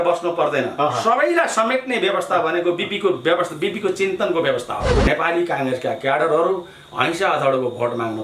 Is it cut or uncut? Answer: cut